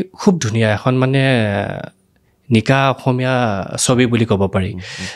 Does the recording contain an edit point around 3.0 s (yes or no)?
no